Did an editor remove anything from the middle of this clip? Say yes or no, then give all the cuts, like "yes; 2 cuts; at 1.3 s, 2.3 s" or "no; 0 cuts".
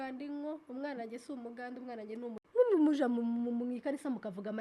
yes; 1 cut; at 2.4 s